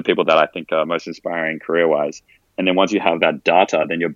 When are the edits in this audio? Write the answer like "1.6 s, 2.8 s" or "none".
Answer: none